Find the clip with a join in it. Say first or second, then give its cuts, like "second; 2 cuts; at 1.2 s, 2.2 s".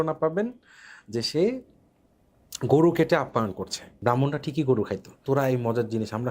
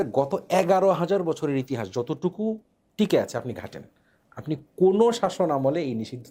first; 2 cuts; at 3.9 s, 5.1 s